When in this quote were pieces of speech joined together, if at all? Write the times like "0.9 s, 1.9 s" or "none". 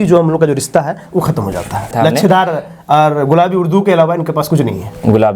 1.9 s